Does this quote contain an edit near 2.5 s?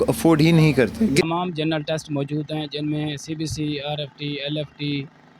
no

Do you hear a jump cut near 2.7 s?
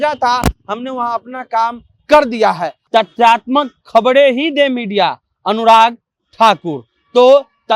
yes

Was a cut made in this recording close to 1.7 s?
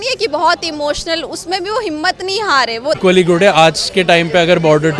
no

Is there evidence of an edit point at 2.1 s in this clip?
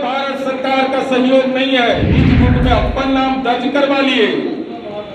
yes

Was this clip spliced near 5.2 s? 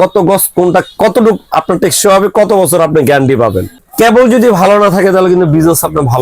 no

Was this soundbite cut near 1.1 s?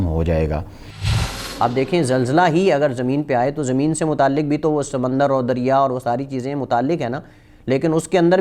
yes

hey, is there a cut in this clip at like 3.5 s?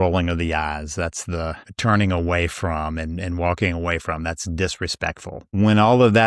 no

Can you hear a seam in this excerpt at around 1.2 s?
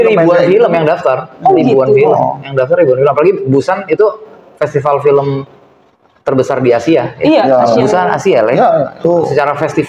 no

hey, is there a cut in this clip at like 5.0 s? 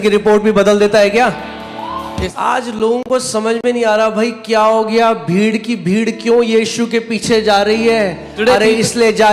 no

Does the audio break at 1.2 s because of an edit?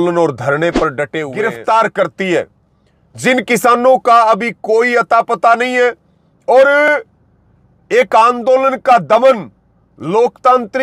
yes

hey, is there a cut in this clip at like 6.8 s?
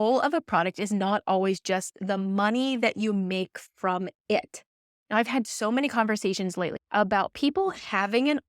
yes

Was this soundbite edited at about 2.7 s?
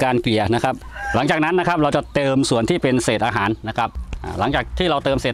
no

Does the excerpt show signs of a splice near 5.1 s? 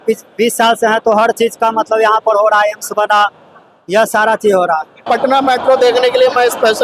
yes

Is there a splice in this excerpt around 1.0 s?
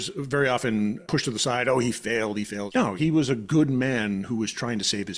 yes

